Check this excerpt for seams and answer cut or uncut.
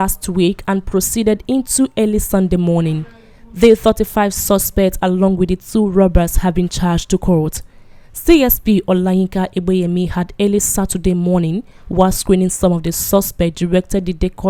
uncut